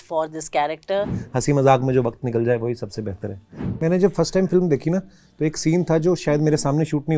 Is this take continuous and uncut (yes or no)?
no